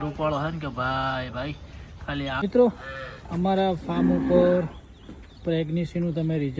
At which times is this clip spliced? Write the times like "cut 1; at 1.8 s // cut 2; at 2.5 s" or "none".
cut 1; at 2.4 s